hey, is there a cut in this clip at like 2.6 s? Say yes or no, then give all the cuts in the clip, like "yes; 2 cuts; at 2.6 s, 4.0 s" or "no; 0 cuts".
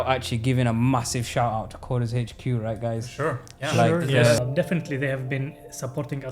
no; 1 cut; at 4.4 s